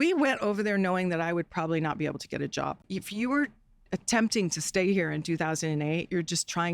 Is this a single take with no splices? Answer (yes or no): no